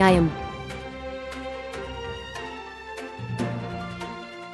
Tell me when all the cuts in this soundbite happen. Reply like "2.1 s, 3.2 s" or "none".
none